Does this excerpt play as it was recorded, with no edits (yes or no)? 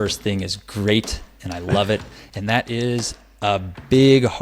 no